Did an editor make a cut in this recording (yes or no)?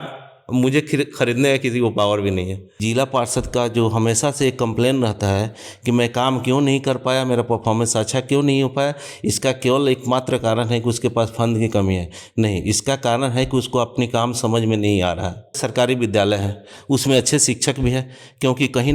yes